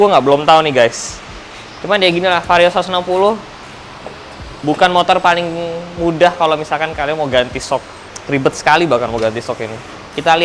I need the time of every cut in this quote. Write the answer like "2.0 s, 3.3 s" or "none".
none